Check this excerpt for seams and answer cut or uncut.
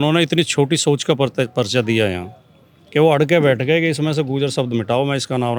uncut